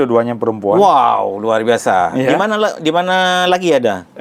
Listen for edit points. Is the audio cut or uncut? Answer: uncut